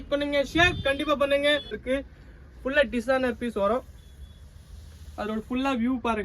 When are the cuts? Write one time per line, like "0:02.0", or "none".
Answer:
0:01.8

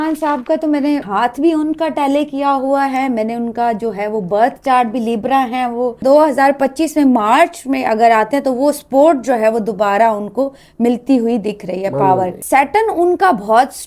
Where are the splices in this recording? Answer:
0:01.1
0:06.0
0:12.4

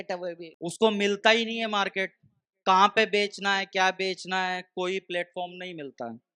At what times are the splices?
none

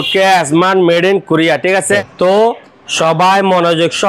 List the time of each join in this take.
0:01.9

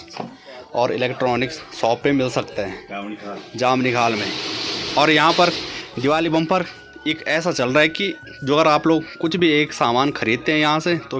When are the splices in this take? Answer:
none

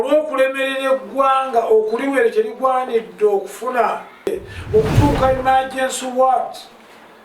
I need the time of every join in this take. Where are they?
0:04.3

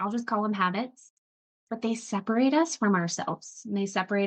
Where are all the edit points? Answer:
none

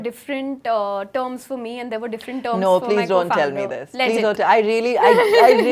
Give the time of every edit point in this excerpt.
none

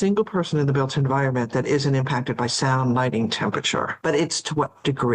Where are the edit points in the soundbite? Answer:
0:03.9

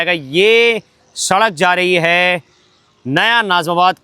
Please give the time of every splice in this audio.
none

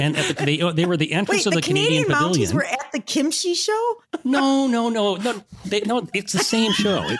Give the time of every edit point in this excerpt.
0:02.6
0:04.0

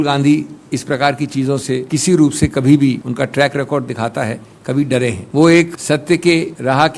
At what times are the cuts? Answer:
0:01.8
0:03.1
0:05.2
0:06.2

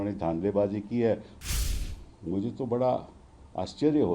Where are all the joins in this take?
0:01.6

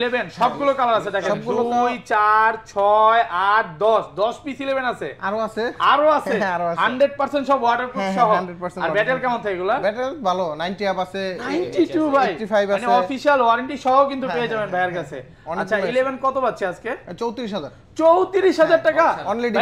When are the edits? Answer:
none

